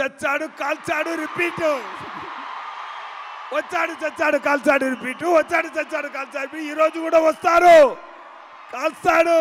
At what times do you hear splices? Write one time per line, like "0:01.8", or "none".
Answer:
none